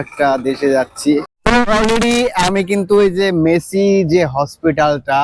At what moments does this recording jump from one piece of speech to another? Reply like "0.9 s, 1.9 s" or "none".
1.3 s